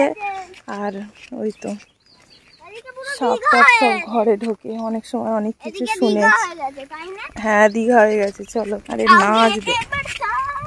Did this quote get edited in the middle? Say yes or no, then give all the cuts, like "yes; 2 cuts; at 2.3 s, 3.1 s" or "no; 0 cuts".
yes; 1 cut; at 8.8 s